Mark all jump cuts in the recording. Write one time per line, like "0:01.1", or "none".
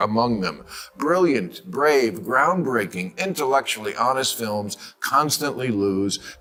none